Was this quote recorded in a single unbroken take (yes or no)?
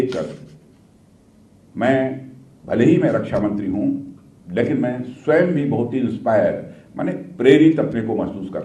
yes